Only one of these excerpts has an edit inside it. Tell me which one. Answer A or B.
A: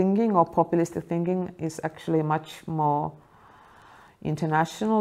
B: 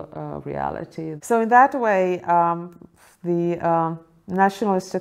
B